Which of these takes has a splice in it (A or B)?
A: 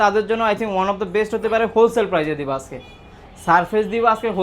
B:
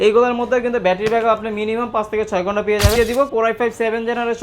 B